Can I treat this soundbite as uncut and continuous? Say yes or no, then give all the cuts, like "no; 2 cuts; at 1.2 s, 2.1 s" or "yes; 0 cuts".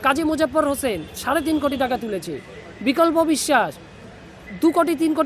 yes; 0 cuts